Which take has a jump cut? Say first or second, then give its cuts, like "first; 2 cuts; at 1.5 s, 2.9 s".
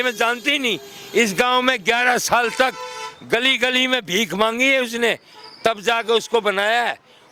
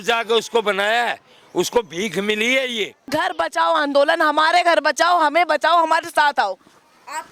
second; 1 cut; at 3.1 s